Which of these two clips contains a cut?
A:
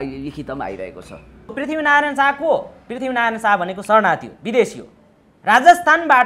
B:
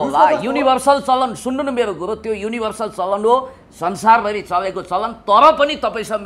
A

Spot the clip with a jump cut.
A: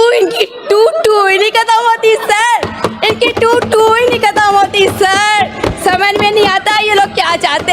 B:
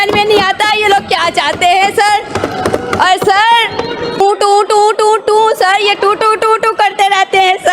B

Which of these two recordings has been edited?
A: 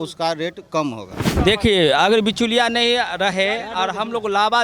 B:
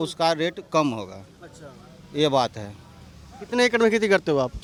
A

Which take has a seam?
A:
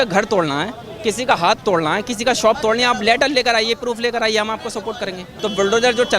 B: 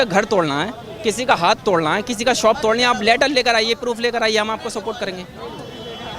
A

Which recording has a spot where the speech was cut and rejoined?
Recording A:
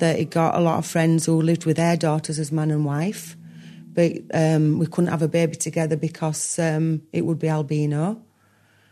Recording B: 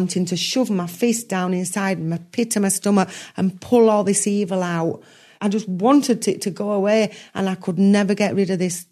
B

